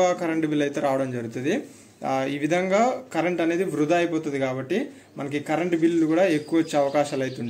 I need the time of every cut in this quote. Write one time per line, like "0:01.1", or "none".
none